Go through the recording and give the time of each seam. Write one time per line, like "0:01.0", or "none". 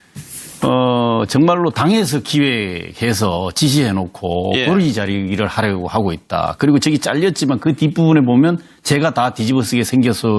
0:03.9